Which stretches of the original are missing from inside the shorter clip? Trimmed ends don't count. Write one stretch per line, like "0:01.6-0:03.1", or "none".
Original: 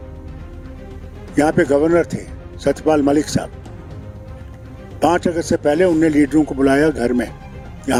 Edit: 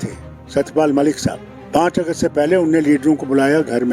0:03.6-0:04.8